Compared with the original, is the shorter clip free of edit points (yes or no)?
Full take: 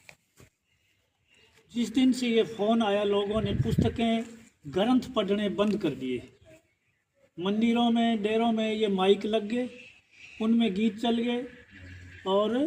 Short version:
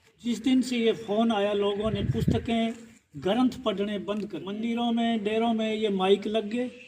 no